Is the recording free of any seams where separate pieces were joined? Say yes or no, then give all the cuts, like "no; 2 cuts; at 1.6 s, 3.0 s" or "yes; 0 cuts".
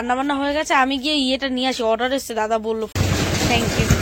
no; 1 cut; at 2.9 s